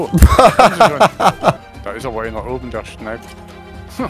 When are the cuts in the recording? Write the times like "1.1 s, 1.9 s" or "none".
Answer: 1.6 s